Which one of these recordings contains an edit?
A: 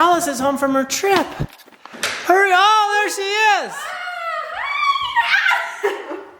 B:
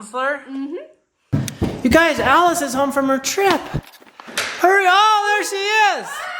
B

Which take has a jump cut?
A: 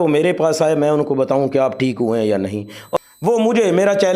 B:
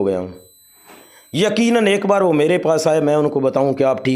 A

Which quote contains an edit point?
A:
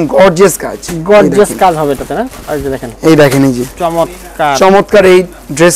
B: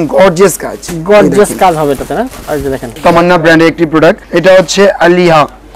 B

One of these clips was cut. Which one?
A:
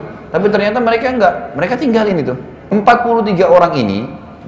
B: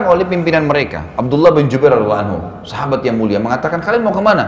A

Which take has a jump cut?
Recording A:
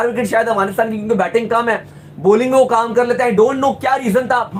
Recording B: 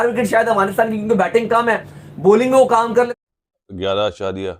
B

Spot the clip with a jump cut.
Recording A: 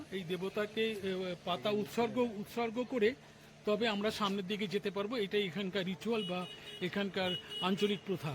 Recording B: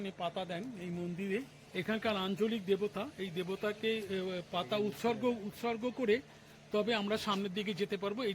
B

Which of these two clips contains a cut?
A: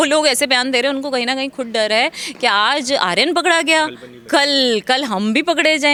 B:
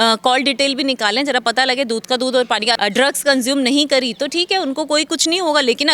B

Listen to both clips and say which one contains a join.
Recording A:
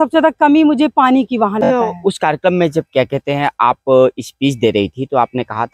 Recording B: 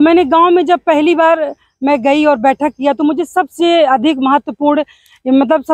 A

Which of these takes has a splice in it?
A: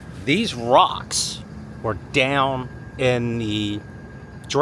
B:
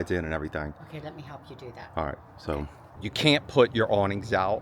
B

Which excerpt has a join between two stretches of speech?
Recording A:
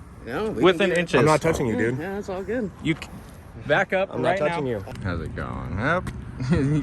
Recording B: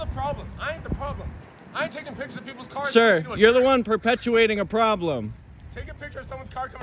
A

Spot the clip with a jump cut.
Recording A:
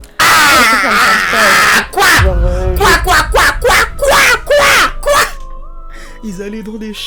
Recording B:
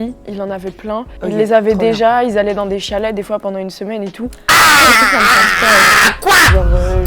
B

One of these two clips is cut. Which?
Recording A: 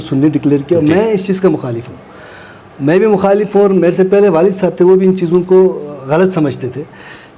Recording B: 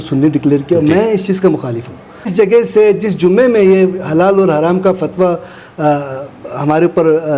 B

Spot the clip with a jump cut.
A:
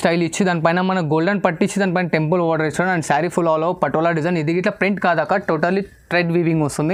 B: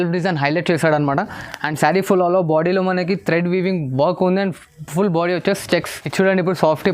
B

